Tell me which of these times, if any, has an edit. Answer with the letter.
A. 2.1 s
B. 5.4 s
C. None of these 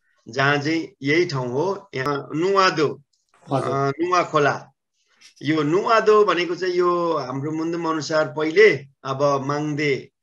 A